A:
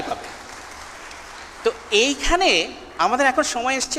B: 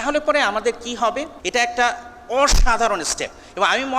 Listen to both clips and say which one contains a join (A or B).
B